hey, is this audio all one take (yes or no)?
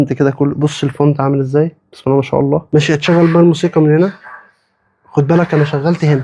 no